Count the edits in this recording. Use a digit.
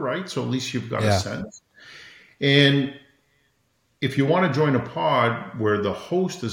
0